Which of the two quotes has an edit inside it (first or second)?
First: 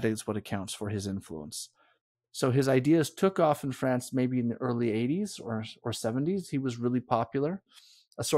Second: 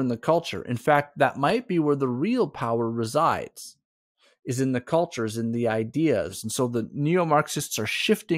second